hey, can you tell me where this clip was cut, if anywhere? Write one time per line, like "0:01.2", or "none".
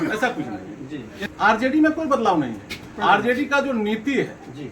0:01.2